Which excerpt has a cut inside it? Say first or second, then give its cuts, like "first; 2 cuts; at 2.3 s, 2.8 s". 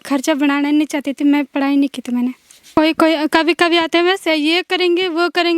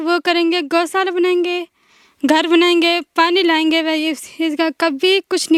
first; 1 cut; at 2.5 s